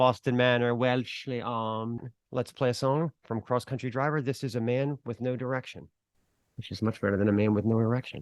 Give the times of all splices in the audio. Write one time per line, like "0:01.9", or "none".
0:02.1